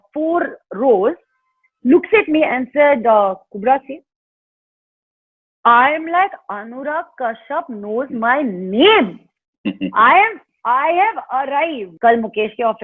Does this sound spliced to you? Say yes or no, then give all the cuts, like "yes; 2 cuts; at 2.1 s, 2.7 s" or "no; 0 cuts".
yes; 1 cut; at 11.8 s